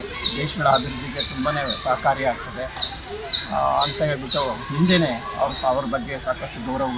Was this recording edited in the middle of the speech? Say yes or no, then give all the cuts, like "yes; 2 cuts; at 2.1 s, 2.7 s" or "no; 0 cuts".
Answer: no; 0 cuts